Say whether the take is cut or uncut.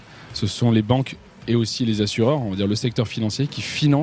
uncut